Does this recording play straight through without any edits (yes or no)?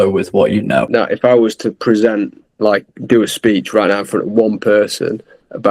yes